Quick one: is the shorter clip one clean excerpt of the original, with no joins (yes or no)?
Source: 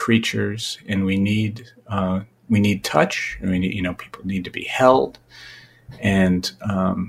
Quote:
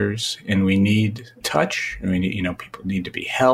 no